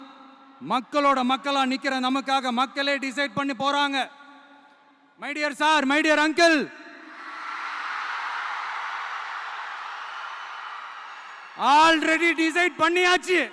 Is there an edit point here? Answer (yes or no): no